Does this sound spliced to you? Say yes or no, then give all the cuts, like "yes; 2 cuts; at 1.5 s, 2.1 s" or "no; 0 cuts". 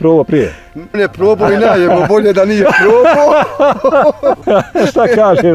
yes; 2 cuts; at 1.0 s, 4.4 s